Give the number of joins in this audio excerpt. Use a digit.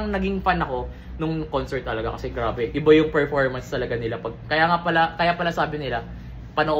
0